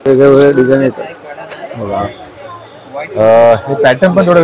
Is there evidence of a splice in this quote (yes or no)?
no